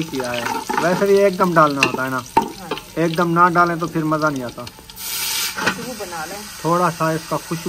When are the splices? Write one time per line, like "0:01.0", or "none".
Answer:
0:05.5